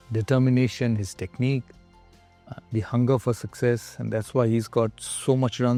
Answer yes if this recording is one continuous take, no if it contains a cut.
yes